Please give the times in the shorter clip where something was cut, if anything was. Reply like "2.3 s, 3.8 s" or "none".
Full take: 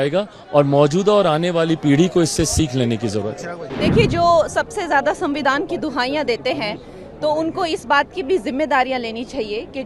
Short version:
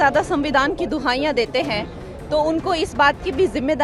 none